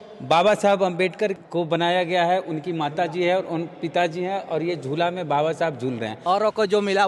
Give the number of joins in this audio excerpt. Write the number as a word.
one